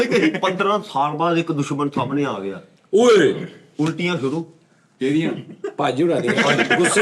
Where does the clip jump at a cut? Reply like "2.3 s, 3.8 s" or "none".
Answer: none